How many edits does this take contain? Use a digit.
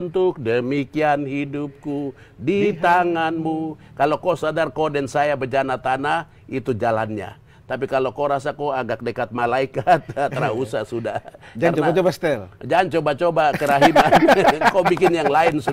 0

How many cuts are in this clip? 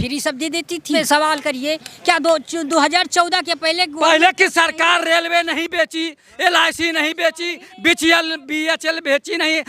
1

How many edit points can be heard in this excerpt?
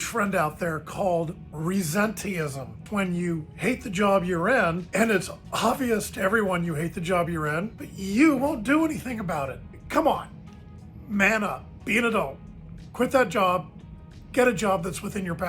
2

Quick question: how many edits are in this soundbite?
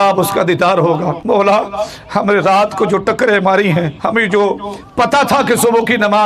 2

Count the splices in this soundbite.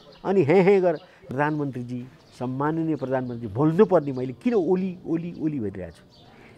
1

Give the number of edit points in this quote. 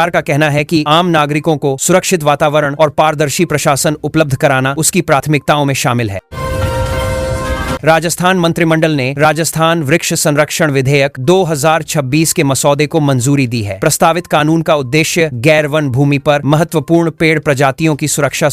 2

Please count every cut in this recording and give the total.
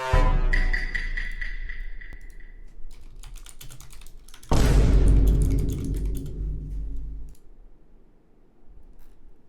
1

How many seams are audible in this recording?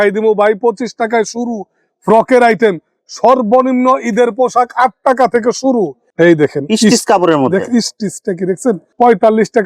1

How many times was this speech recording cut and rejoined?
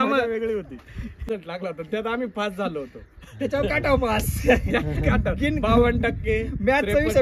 1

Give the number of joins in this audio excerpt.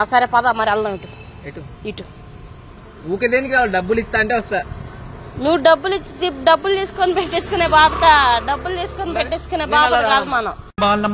0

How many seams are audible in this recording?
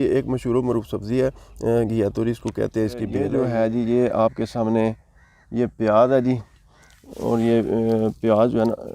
1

